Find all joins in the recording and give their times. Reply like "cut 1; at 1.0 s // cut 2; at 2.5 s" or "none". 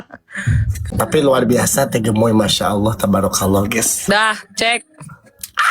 cut 1; at 0.9 s